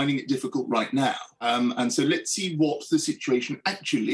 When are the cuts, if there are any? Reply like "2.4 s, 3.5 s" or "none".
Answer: 1.3 s